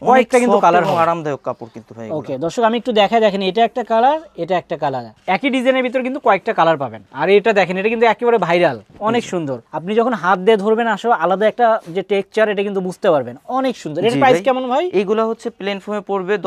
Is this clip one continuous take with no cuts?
yes; 0 cuts

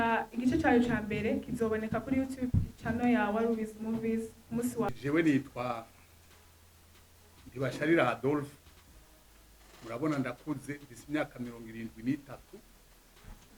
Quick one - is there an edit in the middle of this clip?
yes; 1 cut; at 4.9 s

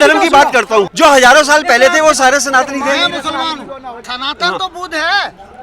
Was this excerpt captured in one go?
no; 2 cuts; at 0.9 s, 4.1 s

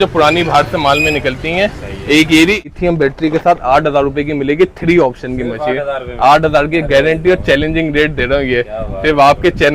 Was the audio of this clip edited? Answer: yes; 1 cut; at 2.7 s

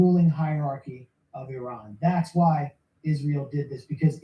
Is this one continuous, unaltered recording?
no; 2 cuts; at 1.6 s, 2.8 s

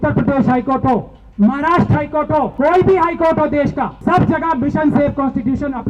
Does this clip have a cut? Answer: yes; 2 cuts; at 2.5 s, 3.9 s

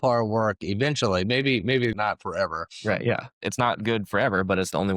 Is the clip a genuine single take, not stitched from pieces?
no; 2 cuts; at 1.9 s, 3.3 s

